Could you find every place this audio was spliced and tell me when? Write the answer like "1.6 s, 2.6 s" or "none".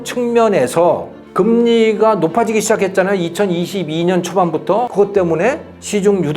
4.9 s